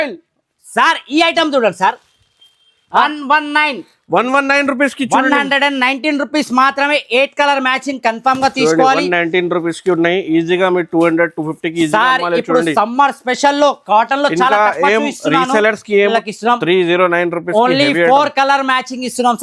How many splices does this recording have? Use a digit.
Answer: 2